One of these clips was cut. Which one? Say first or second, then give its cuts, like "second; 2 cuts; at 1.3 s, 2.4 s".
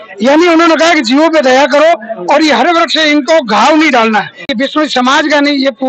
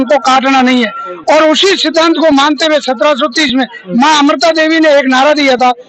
first; 1 cut; at 4.5 s